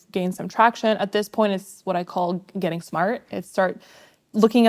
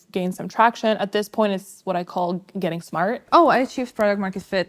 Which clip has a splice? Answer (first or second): second